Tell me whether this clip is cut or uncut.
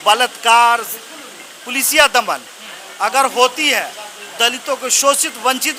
uncut